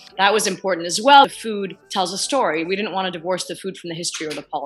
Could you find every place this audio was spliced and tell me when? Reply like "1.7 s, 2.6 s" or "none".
none